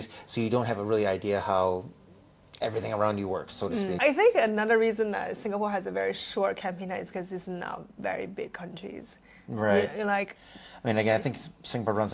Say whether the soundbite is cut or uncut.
cut